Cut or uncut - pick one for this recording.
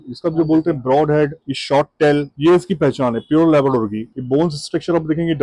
uncut